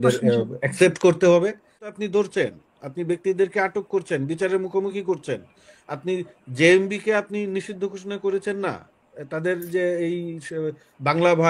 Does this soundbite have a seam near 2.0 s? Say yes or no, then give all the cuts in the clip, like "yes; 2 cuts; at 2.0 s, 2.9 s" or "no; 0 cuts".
yes; 1 cut; at 2.0 s